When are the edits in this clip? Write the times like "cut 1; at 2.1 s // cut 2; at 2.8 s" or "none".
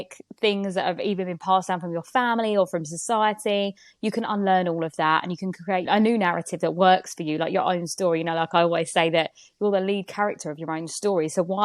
none